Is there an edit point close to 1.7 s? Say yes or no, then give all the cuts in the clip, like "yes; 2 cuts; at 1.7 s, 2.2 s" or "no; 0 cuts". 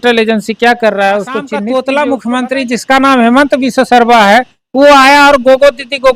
yes; 1 cut; at 1.7 s